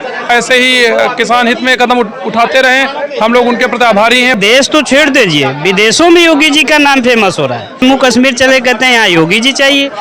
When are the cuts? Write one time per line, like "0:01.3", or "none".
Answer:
0:04.4
0:07.8